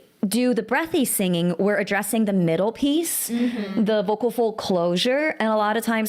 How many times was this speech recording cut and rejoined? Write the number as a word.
zero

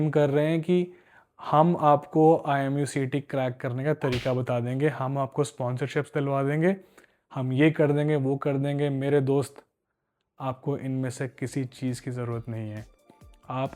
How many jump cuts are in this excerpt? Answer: zero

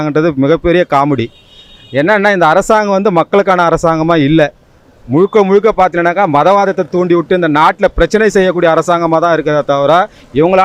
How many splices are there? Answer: zero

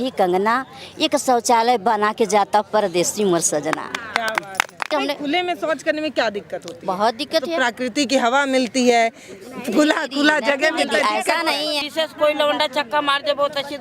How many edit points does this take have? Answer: two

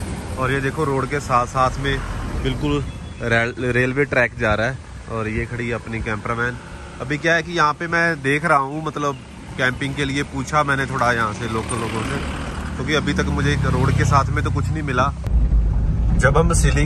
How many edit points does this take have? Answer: one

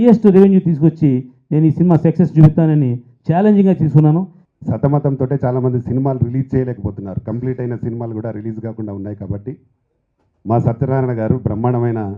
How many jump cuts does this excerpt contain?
one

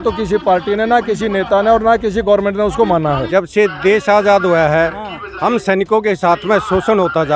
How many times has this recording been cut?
one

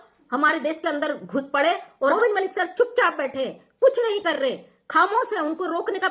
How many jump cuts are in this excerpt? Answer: one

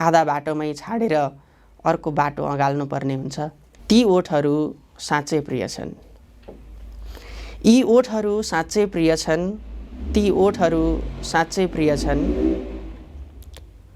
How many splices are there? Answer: one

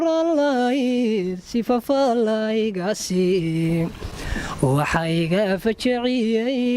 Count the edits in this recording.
zero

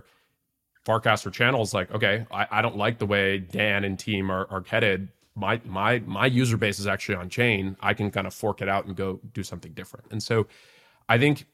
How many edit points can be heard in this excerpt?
zero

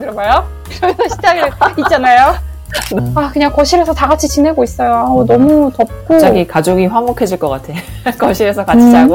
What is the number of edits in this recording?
one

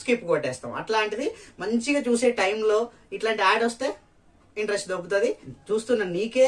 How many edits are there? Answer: one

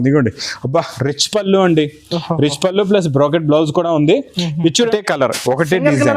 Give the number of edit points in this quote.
one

